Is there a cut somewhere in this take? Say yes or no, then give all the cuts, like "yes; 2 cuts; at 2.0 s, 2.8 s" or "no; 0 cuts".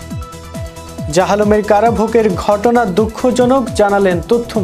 yes; 1 cut; at 1.1 s